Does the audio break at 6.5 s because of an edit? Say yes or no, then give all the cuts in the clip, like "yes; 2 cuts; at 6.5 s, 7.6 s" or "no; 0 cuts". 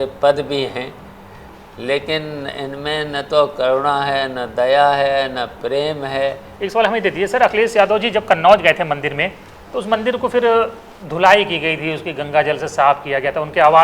yes; 1 cut; at 6.5 s